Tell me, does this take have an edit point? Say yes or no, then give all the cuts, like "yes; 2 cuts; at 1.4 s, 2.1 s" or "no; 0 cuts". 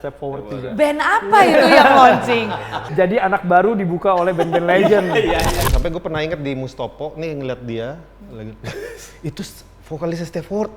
yes; 2 cuts; at 2.9 s, 5.6 s